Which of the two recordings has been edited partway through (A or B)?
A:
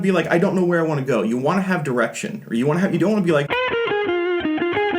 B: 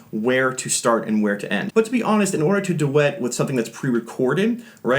B